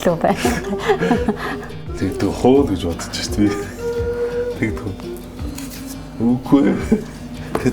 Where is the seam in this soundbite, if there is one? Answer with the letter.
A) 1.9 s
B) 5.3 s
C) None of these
A